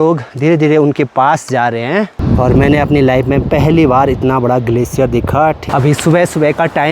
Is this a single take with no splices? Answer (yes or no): no